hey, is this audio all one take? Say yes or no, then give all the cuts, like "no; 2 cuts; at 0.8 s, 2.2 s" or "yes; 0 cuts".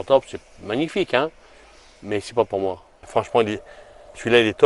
no; 1 cut; at 3.1 s